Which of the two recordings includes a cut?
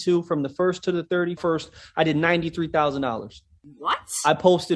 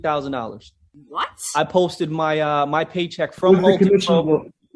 first; 1 cut; at 1.4 s

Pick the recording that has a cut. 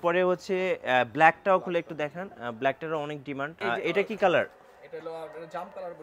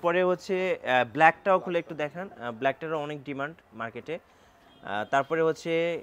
first; 1 cut; at 3.5 s

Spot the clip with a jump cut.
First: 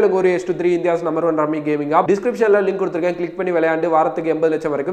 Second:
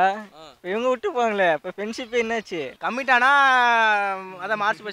second; 1 cut; at 2.7 s

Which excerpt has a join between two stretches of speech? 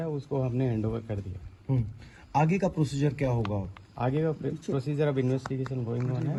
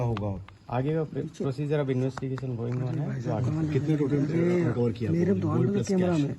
second; 1 cut; at 5.1 s

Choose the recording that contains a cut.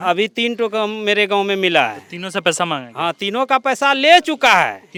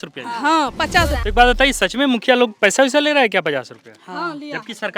second; 1 cut; at 1.2 s

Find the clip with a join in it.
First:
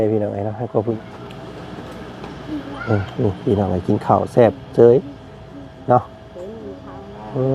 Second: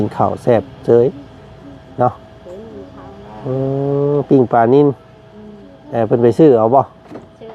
first; 1 cut; at 0.9 s

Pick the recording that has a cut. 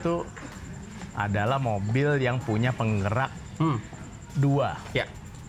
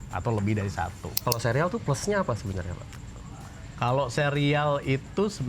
second; 1 cut; at 1.1 s

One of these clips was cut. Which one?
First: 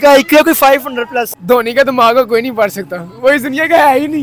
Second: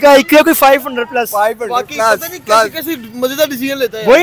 first; 1 cut; at 1.3 s

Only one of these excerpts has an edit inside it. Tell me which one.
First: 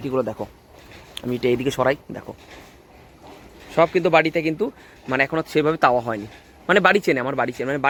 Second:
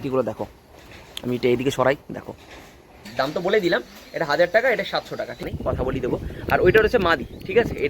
second; 2 cuts; at 3.0 s, 5.4 s

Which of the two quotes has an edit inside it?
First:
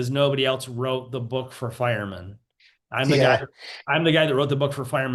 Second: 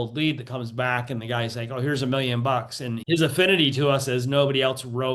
second; 1 cut; at 3.0 s

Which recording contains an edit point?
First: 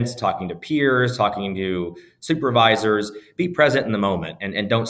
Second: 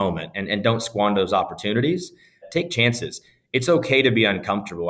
second; 1 cut; at 2.4 s

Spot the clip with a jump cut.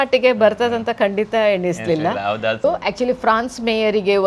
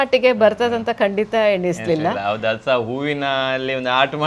first; 1 cut; at 2.6 s

